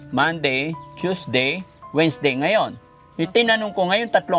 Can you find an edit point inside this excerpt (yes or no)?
no